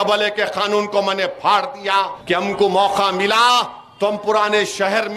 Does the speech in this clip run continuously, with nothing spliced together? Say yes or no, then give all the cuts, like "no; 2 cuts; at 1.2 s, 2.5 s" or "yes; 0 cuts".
no; 1 cut; at 2.2 s